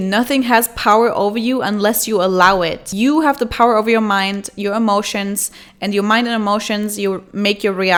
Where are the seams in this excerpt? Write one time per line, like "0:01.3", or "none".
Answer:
none